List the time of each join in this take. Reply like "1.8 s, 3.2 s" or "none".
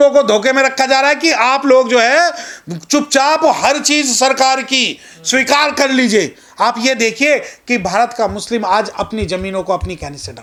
none